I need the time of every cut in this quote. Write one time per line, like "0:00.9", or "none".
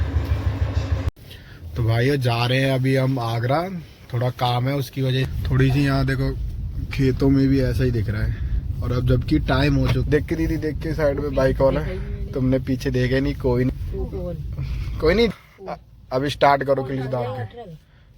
0:01.1
0:05.3
0:10.0
0:13.7
0:15.3